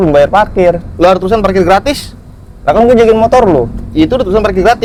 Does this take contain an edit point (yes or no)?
no